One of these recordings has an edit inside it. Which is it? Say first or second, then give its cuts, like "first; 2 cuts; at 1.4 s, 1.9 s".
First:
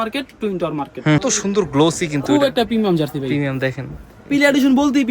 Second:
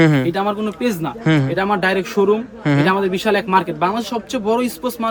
first; 1 cut; at 1.2 s